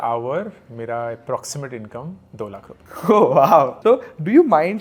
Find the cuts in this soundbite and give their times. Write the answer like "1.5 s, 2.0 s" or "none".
none

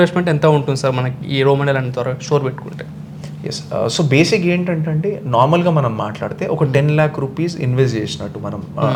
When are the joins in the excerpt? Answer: none

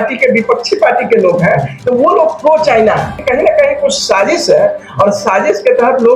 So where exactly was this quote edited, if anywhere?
1.7 s, 3.2 s

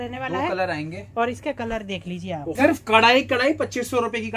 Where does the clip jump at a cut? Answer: 2.6 s

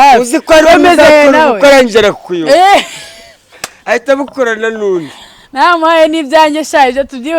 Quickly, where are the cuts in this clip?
none

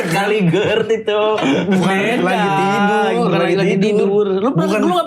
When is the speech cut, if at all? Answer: none

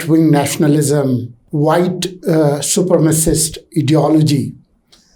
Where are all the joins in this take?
1.4 s

